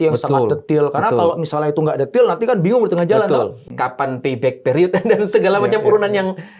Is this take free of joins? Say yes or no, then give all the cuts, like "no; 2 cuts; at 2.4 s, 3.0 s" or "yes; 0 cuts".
no; 1 cut; at 3.6 s